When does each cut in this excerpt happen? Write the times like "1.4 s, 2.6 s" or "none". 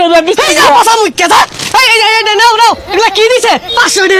none